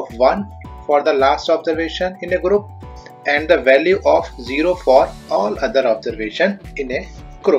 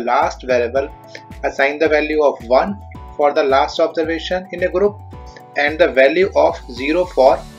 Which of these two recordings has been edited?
first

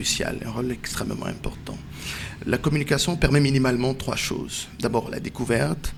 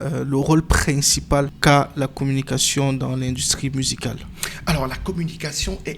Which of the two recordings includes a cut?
second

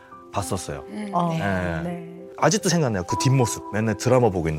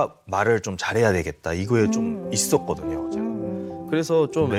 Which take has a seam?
first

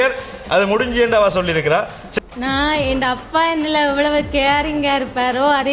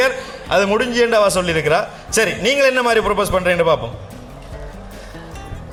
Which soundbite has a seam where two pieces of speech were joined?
first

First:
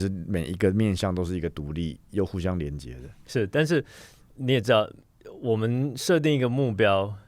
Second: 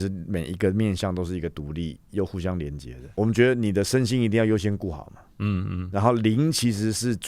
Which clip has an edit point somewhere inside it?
second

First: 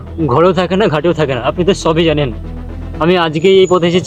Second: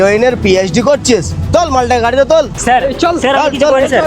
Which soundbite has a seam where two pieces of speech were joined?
second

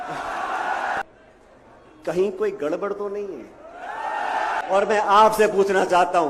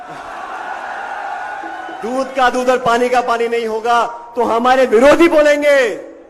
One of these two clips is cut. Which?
first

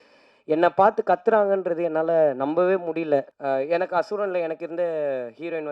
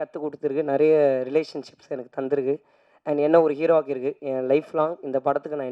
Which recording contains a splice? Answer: first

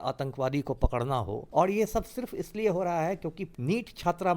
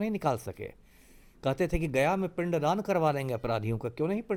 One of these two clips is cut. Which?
first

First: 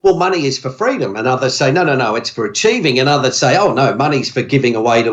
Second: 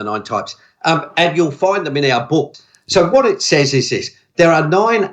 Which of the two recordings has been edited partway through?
second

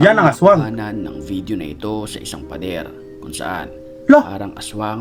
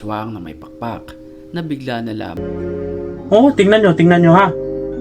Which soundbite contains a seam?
second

